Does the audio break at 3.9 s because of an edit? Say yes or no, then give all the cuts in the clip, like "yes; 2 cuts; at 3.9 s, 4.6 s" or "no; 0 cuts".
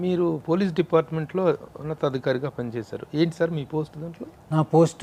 no; 0 cuts